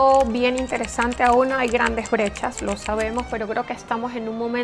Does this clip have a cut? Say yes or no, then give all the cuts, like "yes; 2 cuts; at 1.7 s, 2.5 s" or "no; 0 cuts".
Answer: no; 0 cuts